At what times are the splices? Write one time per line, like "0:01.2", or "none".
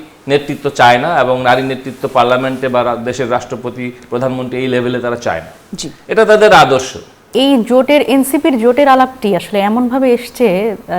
0:07.3